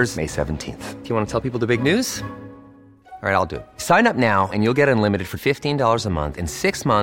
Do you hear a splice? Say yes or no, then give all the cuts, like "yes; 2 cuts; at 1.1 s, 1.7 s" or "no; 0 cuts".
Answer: no; 0 cuts